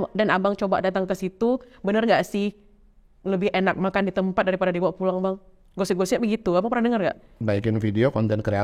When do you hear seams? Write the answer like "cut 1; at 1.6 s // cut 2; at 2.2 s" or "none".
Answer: cut 1; at 7.4 s